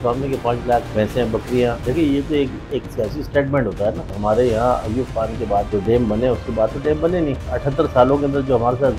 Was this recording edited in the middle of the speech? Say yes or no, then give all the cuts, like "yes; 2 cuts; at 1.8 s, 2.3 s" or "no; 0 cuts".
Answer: yes; 5 cuts; at 0.9 s, 1.8 s, 4.2 s, 5.7 s, 7.5 s